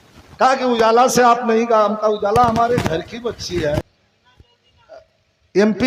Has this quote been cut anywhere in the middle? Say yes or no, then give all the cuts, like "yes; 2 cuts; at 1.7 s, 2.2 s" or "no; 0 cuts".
yes; 1 cut; at 3.8 s